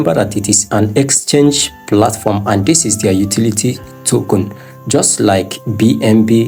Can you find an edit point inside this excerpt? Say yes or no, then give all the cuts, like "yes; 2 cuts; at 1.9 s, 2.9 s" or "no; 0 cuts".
no; 0 cuts